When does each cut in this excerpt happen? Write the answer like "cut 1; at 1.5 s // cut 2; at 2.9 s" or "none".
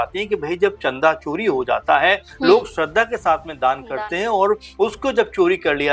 none